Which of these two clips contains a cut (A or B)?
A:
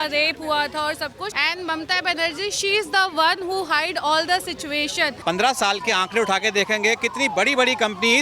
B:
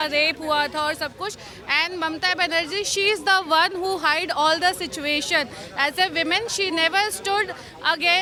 A